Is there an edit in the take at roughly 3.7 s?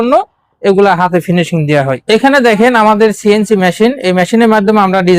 no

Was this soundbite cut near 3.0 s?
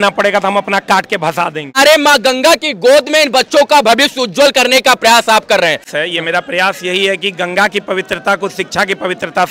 no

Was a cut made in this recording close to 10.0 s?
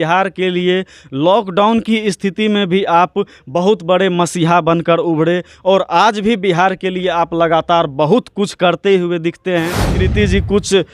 yes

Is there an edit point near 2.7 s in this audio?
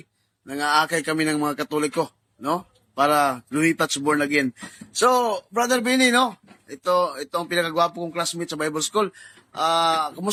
no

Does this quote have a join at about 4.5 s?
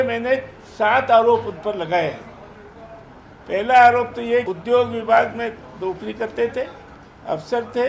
yes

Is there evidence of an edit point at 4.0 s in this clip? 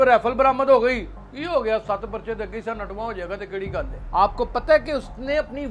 yes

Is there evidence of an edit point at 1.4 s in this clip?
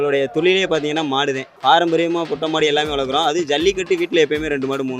no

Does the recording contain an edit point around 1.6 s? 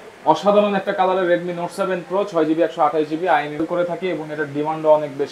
no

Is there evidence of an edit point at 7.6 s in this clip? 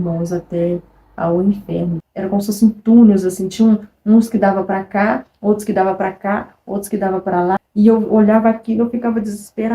yes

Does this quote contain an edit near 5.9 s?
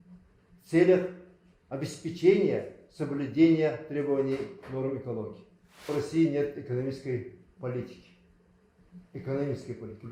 yes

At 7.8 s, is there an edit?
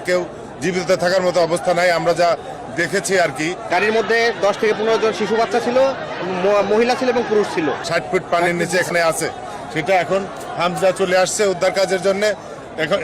yes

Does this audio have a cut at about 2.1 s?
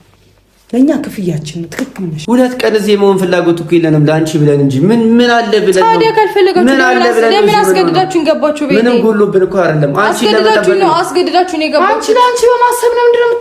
yes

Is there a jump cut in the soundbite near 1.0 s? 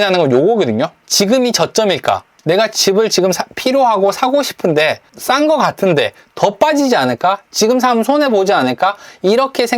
yes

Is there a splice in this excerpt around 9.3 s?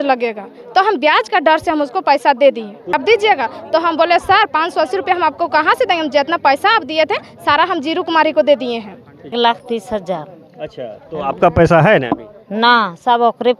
yes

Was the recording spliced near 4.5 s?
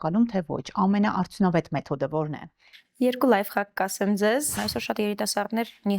yes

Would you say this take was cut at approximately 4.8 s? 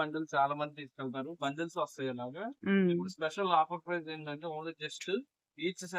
no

